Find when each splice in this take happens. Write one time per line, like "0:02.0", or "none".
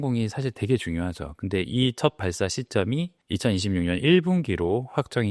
none

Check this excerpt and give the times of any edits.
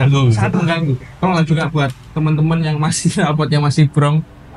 0:01.2

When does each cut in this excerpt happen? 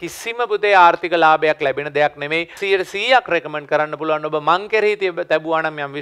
0:02.6

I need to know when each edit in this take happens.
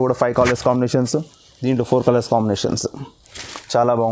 none

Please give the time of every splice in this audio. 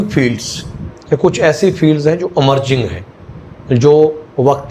none

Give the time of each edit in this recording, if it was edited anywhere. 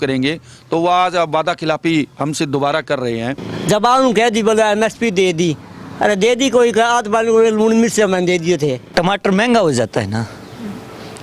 0:03.5
0:08.8

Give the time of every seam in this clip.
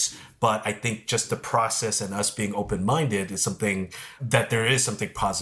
0:04.2

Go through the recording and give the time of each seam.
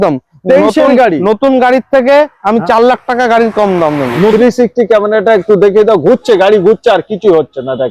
0:04.3

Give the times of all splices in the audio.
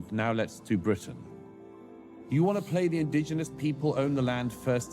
0:01.9

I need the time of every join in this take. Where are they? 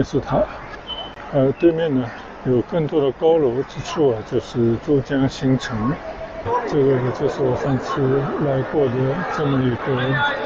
0:06.4

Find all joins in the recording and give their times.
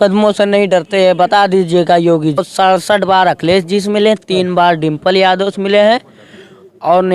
0:02.4

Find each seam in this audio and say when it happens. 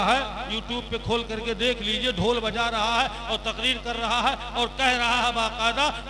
none

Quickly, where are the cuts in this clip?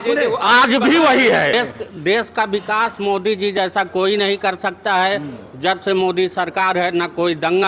0:01.5

